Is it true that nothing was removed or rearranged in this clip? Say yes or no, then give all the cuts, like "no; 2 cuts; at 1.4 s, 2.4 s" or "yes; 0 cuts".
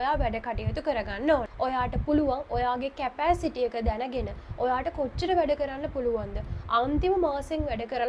no; 1 cut; at 1.5 s